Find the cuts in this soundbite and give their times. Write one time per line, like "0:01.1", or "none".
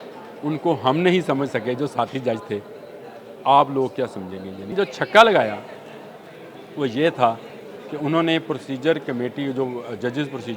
0:04.7